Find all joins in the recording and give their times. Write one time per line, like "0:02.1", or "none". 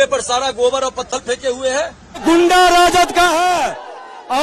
0:02.0